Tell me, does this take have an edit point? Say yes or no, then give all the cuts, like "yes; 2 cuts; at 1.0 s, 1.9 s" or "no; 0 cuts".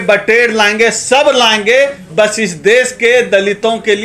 no; 0 cuts